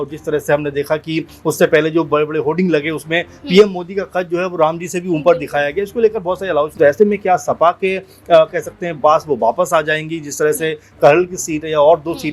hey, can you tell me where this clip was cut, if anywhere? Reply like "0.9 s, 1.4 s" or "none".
6.8 s